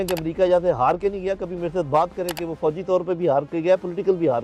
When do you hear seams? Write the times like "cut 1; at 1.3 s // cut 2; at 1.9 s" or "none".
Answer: none